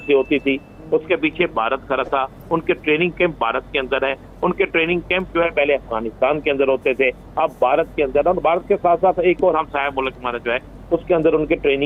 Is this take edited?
no; 0 cuts

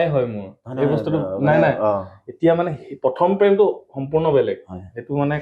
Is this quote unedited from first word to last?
yes; 0 cuts

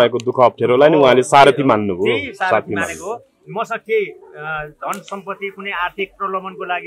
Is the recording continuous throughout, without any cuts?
yes; 0 cuts

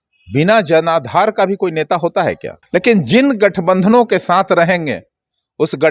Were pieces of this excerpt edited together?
yes; 1 cut; at 2.5 s

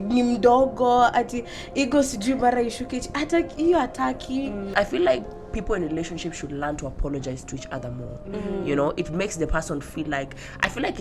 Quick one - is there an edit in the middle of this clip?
yes; 1 cut; at 4.7 s

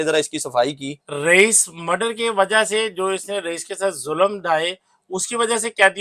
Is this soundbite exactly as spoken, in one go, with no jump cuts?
yes; 0 cuts

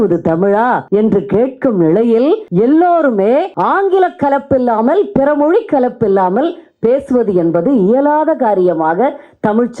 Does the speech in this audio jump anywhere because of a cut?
yes; 3 cuts; at 0.8 s, 2.5 s, 3.5 s

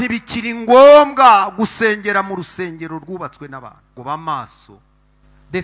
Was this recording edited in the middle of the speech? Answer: yes; 1 cut; at 4.0 s

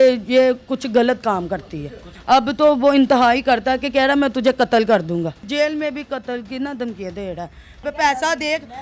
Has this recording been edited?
yes; 3 cuts; at 2.1 s, 5.5 s, 7.8 s

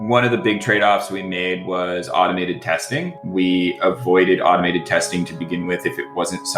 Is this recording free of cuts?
yes; 0 cuts

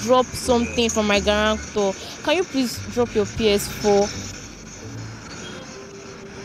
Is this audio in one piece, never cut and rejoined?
yes; 0 cuts

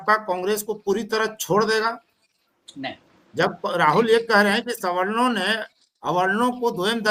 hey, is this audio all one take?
yes; 0 cuts

